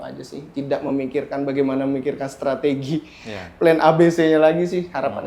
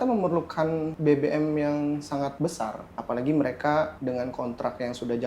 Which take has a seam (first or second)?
second